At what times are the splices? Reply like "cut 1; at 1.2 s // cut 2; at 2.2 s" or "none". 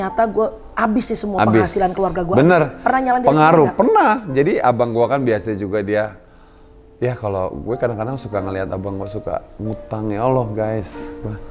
none